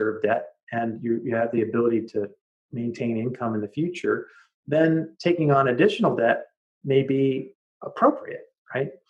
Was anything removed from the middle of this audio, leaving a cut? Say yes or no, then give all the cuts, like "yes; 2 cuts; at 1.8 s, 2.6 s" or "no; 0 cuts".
no; 0 cuts